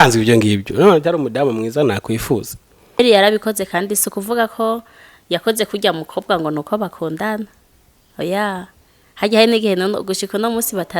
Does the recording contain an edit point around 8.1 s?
no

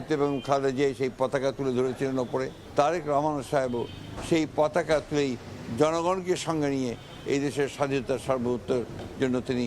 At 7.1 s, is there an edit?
no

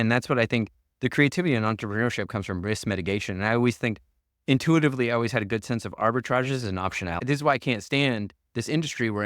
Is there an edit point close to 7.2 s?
yes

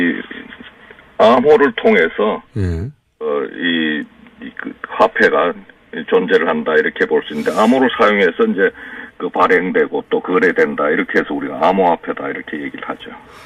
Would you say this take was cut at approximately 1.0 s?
yes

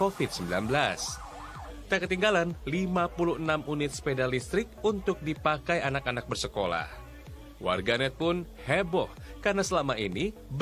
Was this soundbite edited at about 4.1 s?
yes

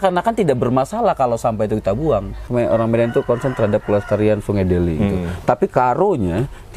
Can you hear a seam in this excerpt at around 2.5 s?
yes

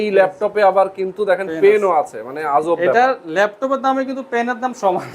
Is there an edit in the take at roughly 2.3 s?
no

